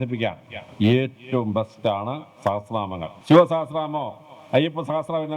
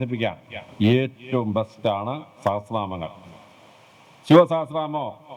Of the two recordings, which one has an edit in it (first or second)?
first